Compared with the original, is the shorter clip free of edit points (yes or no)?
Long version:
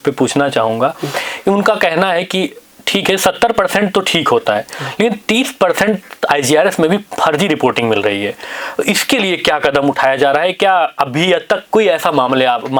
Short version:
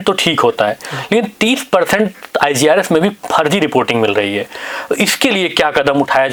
yes